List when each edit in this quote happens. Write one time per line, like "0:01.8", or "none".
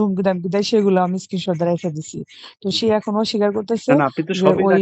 none